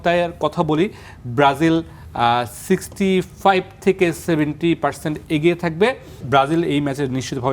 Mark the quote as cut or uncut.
cut